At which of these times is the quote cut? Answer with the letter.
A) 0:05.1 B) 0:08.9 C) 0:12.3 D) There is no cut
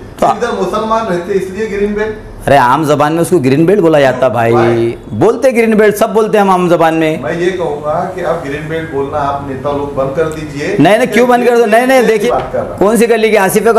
C